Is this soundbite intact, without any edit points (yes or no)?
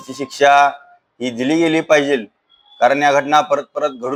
yes